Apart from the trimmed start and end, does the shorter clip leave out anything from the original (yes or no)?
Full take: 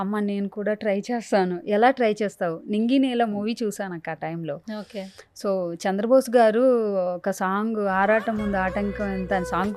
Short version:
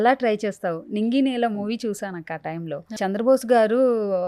yes